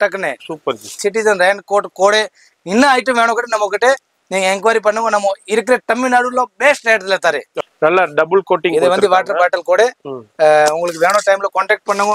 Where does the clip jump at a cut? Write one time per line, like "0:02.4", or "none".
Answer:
0:00.9
0:07.6

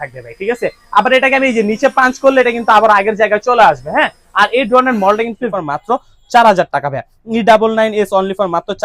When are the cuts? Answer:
0:05.5

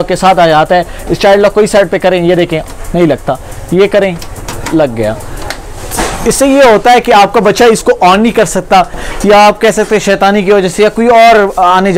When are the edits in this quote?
none

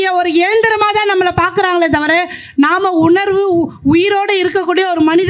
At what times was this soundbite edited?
none

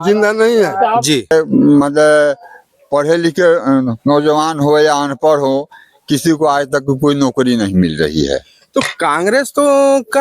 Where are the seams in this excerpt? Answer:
0:01.3

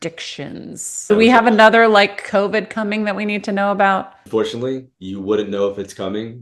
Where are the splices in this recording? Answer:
0:01.1
0:04.2

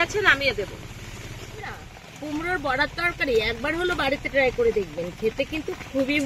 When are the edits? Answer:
0:01.5

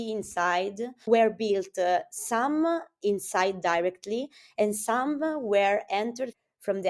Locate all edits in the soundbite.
none

